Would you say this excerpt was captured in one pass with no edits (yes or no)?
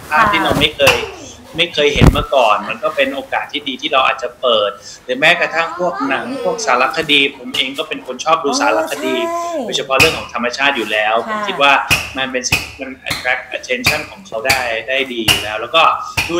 yes